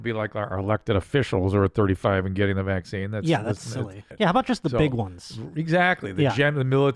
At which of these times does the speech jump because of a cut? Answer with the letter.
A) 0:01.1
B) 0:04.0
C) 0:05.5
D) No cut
B